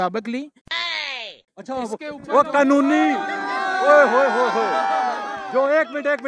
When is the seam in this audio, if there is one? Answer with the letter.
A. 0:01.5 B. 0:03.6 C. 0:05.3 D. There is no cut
A